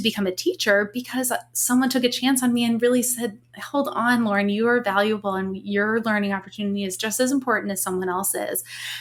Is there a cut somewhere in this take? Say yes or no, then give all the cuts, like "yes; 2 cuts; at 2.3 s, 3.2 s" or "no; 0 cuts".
no; 0 cuts